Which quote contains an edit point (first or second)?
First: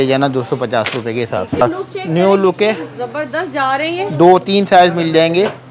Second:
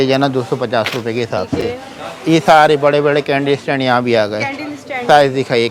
first